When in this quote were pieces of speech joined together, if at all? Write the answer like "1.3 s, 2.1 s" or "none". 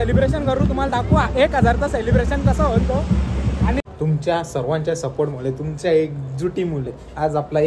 3.8 s